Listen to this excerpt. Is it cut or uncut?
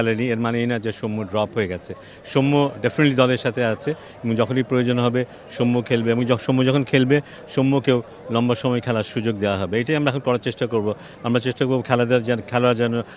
uncut